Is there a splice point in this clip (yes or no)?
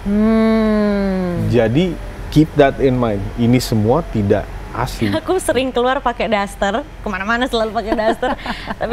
yes